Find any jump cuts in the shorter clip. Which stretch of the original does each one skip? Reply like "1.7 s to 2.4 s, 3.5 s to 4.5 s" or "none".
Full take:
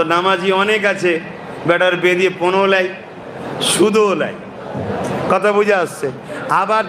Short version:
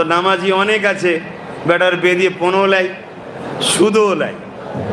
none